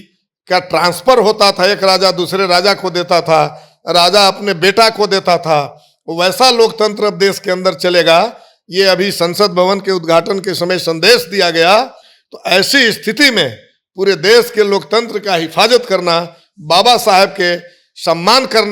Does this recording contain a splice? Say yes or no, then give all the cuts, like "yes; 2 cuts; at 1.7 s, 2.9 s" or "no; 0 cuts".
no; 0 cuts